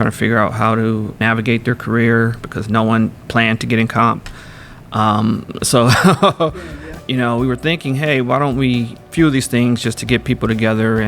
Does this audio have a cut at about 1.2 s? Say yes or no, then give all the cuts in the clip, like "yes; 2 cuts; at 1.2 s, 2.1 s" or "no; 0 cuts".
yes; 3 cuts; at 1.2 s, 6.4 s, 9.0 s